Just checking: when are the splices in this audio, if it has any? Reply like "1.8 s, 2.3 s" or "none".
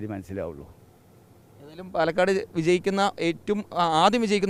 none

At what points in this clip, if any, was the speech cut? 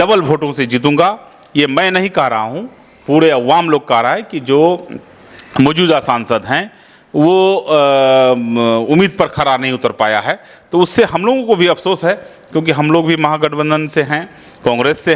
none

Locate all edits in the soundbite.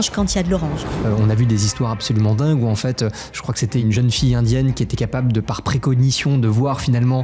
0.9 s, 3.8 s

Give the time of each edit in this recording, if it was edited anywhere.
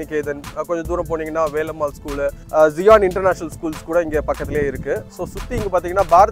2.4 s

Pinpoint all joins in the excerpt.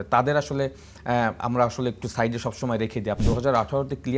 3.2 s

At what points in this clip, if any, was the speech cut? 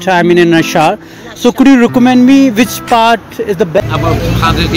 3.8 s

